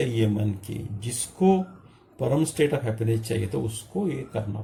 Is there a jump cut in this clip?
no; 0 cuts

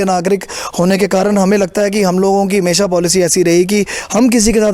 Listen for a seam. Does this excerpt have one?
no; 0 cuts

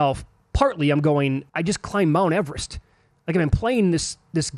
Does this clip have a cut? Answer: yes; 1 cut; at 1.5 s

